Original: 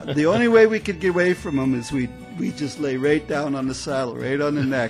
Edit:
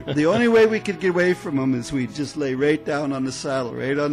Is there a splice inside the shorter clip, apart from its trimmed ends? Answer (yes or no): yes